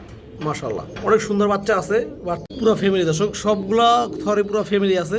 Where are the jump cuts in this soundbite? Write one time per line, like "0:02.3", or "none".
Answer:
0:02.4